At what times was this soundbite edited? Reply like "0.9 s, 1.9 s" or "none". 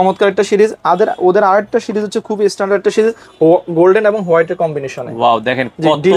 none